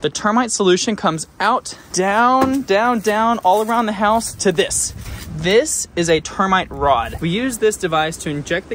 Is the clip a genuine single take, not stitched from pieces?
no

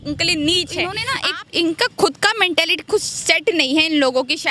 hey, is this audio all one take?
no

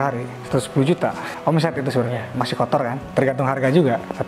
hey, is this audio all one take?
no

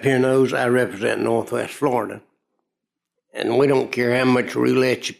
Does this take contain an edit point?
no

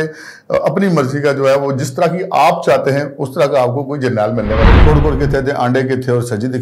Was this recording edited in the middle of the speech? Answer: yes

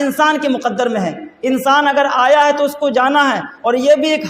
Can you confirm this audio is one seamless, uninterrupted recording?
no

